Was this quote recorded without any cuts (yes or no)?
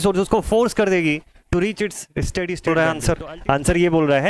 no